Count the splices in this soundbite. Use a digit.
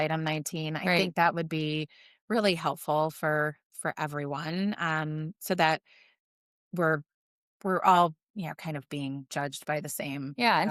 0